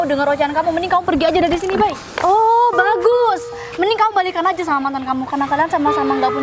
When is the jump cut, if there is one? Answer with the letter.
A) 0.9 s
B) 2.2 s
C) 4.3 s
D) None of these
B